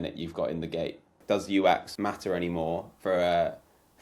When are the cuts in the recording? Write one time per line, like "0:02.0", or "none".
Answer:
0:01.2
0:01.9